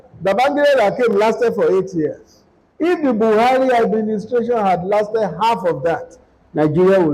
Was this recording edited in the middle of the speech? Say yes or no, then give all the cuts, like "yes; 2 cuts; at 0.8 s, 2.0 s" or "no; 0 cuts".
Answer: no; 0 cuts